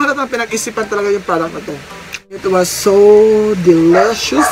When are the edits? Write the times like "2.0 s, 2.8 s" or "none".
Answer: 2.4 s

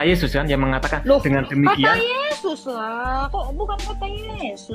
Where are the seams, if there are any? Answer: none

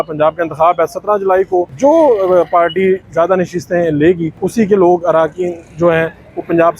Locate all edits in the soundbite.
1.7 s, 4.3 s

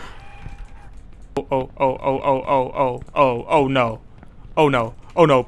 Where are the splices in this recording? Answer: 1.4 s

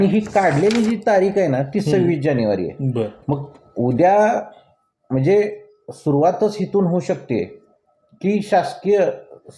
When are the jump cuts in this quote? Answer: none

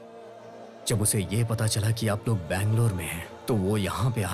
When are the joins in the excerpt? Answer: none

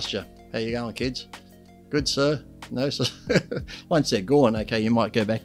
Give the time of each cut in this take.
3.7 s

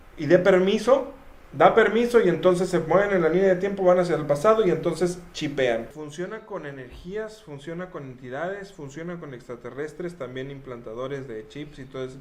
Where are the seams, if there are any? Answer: 6.0 s

